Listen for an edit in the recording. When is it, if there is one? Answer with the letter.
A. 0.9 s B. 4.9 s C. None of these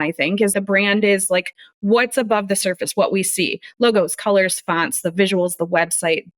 C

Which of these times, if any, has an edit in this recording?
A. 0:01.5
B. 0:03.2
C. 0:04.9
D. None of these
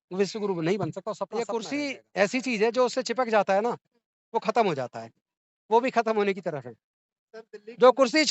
A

